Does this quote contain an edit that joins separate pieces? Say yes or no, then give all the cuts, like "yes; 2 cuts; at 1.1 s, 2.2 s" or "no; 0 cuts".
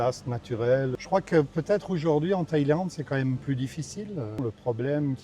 yes; 2 cuts; at 1.0 s, 4.4 s